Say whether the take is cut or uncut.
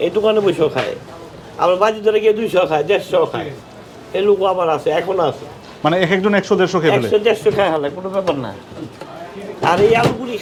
uncut